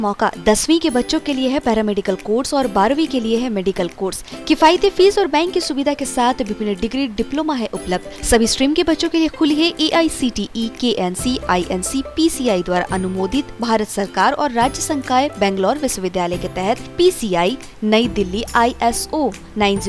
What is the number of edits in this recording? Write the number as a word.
zero